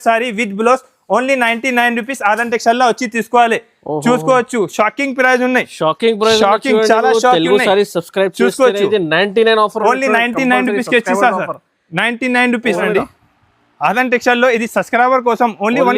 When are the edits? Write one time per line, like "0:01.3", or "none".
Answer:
0:12.8